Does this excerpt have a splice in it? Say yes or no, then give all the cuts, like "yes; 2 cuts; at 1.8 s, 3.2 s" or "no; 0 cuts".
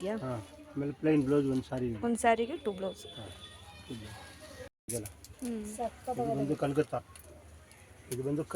yes; 1 cut; at 4.8 s